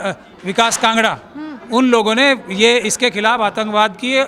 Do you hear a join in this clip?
no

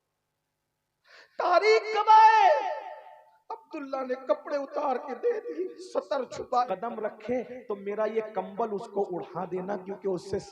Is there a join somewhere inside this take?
yes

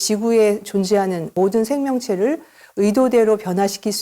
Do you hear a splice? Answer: yes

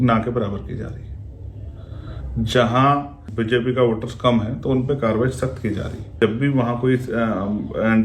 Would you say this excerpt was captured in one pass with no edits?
no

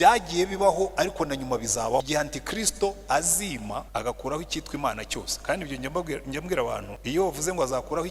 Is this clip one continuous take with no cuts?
no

